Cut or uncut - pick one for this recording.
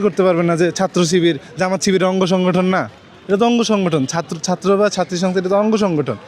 uncut